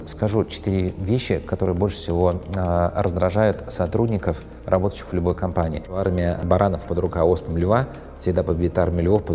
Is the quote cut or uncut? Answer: cut